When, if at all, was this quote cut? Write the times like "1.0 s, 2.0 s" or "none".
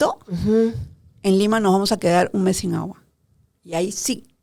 none